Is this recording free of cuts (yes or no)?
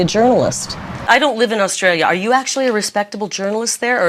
no